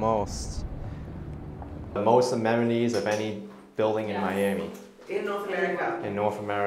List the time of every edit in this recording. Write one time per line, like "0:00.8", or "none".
0:02.0